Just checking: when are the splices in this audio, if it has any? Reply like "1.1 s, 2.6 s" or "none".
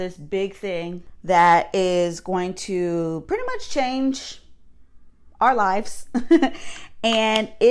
1.1 s